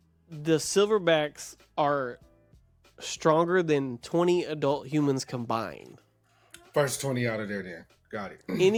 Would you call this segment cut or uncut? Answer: uncut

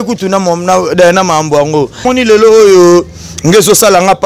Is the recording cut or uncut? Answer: cut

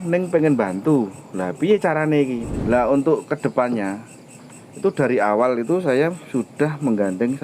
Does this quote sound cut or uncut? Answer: cut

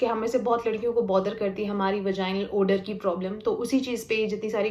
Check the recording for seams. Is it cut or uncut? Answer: uncut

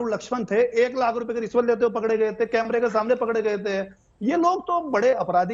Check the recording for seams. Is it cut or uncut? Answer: uncut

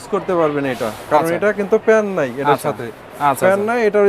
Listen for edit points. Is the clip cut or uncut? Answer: uncut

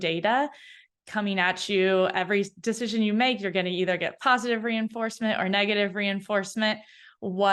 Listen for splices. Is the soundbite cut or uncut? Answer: uncut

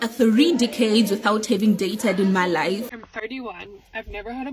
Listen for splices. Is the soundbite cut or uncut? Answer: cut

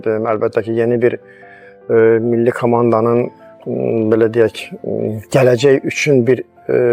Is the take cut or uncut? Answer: uncut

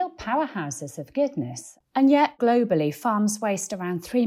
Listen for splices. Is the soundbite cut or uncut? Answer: cut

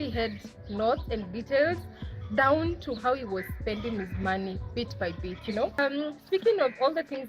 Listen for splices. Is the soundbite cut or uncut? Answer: cut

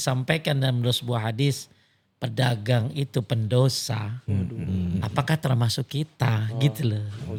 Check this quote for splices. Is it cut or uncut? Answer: uncut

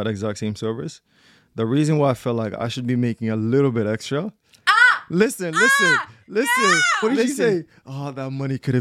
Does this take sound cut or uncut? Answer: cut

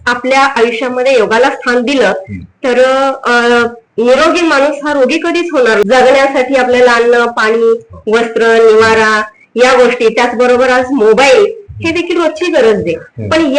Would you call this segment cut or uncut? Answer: cut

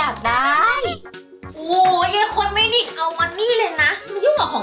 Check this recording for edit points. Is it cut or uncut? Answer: uncut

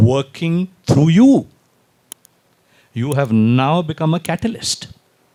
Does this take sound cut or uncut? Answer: uncut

